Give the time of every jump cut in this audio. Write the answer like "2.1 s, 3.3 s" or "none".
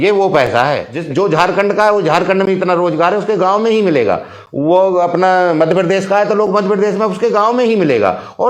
0.9 s